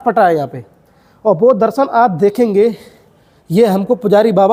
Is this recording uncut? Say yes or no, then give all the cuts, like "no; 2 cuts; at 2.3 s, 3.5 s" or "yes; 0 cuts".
yes; 0 cuts